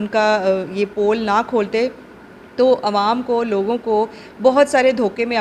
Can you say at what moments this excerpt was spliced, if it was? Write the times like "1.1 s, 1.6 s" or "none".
none